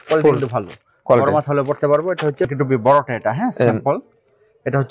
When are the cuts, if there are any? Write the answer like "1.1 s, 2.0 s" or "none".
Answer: 2.5 s